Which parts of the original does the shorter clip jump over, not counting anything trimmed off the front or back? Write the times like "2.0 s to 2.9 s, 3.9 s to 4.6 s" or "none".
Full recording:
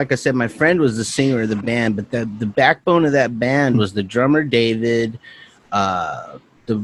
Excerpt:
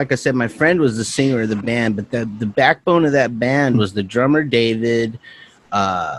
none